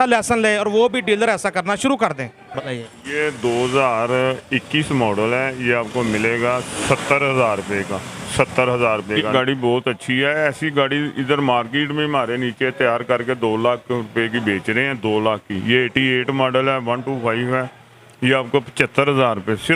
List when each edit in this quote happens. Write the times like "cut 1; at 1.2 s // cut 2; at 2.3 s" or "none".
cut 1; at 2.6 s // cut 2; at 9.3 s